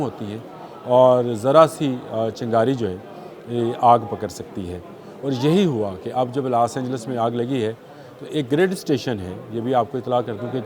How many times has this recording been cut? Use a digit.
0